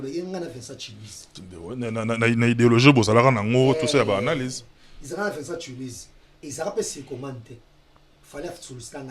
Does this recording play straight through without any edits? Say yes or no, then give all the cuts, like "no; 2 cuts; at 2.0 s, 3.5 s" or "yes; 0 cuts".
yes; 0 cuts